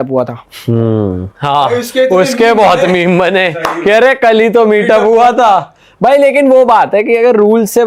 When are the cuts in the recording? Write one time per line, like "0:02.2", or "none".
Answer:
none

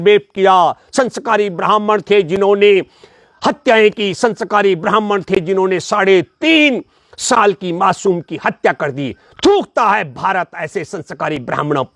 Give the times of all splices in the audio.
none

